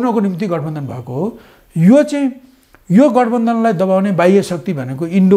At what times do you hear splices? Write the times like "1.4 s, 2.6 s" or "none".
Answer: none